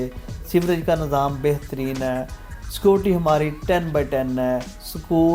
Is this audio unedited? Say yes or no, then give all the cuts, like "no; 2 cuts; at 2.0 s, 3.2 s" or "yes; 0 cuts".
yes; 0 cuts